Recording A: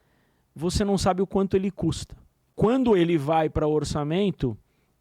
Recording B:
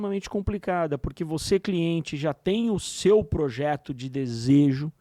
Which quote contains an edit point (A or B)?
A